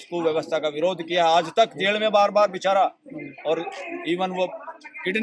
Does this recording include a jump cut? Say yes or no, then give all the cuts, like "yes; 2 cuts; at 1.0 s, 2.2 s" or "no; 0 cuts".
no; 0 cuts